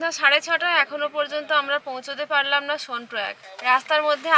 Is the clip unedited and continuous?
no; 1 cut; at 3.4 s

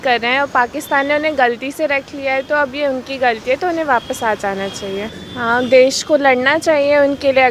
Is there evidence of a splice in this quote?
no; 0 cuts

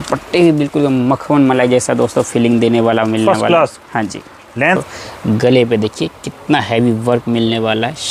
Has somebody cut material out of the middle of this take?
yes; 1 cut; at 4.8 s

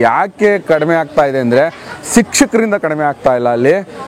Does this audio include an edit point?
no; 0 cuts

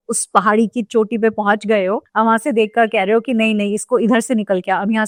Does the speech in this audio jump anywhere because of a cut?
no; 0 cuts

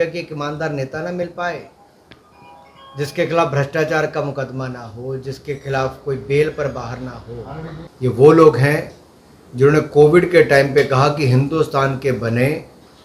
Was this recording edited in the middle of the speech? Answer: yes; 1 cut; at 7.8 s

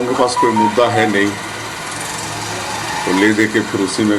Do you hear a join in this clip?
no; 0 cuts

